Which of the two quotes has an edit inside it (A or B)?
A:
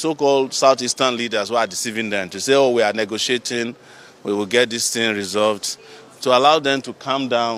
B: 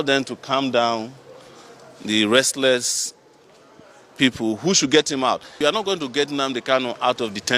B